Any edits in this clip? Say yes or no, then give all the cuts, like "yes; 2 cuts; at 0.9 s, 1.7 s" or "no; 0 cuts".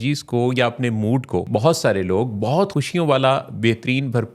yes; 2 cuts; at 1.5 s, 2.7 s